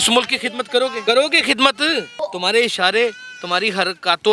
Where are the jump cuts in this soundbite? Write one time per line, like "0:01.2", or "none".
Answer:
0:01.0
0:02.1